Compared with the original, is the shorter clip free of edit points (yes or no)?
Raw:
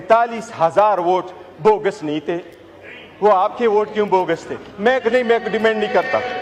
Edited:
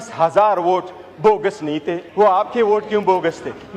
no